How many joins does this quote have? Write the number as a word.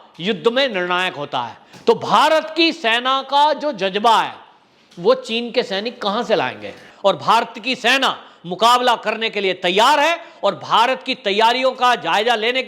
one